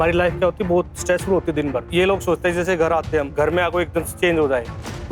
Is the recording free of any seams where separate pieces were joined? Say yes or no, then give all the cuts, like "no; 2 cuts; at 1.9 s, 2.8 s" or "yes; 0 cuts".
no; 3 cuts; at 1.9 s, 3.3 s, 4.1 s